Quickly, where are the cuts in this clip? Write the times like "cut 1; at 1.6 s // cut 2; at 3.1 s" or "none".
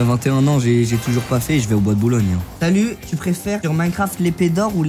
cut 1; at 2.5 s